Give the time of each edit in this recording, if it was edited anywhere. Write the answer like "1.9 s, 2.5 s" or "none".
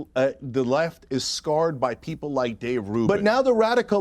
3.1 s